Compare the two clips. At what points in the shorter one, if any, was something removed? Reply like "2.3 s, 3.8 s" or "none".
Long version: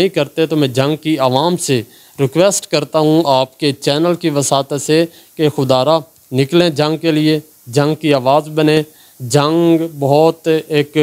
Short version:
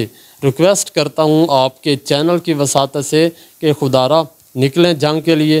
none